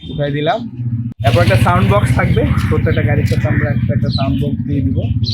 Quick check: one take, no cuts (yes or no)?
no